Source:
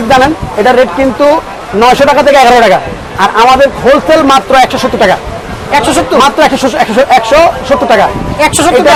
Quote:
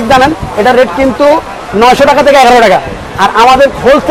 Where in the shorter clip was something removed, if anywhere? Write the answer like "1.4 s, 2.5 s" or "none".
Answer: none